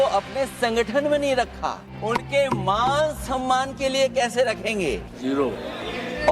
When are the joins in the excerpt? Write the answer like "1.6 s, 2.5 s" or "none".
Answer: 2.0 s, 5.1 s